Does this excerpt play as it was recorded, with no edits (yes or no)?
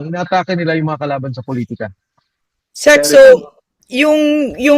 yes